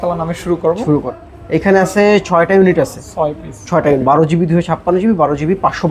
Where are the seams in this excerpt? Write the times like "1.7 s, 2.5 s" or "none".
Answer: 1.1 s, 4.0 s